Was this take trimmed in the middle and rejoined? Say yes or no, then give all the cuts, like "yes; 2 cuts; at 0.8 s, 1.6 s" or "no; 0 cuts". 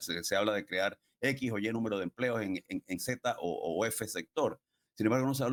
no; 0 cuts